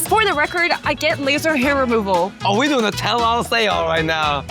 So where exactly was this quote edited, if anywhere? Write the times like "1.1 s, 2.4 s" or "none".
2.4 s